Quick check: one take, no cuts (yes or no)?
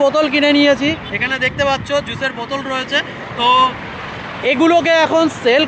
yes